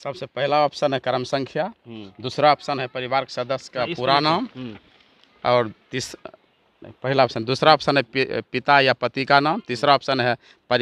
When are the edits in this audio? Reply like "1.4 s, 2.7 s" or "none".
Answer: none